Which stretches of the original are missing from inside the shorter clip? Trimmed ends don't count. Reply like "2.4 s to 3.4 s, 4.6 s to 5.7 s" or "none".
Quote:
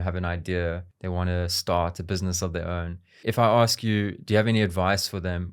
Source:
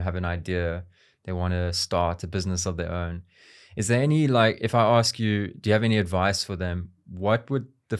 0.9 s to 1.1 s, 3.5 s to 4.6 s